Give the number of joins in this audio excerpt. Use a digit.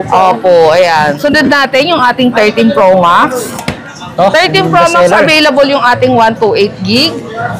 1